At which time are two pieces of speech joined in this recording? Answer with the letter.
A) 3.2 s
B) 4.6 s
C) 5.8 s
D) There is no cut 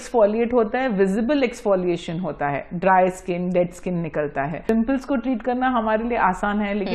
B